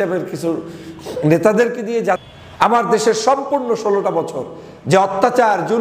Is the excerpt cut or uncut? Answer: cut